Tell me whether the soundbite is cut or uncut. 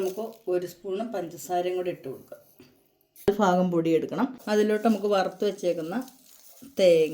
cut